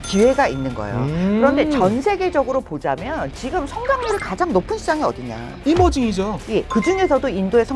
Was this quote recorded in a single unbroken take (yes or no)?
no